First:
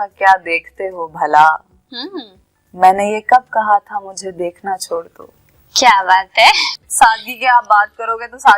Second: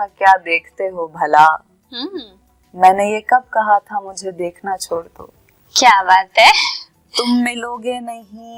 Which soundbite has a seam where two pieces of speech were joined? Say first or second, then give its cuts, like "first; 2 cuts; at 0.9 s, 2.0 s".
first; 1 cut; at 6.8 s